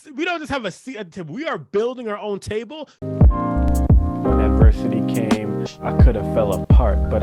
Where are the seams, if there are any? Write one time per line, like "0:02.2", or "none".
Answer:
0:02.9